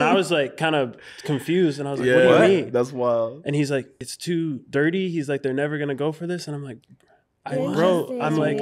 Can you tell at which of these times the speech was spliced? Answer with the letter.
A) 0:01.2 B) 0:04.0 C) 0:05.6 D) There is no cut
B